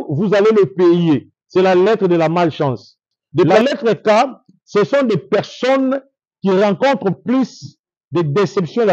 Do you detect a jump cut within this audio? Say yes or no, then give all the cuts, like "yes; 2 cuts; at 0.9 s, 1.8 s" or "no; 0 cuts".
yes; 1 cut; at 3.5 s